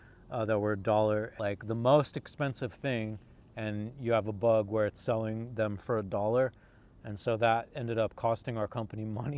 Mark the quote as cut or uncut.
cut